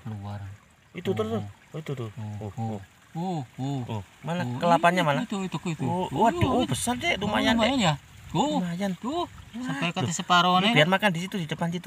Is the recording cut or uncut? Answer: uncut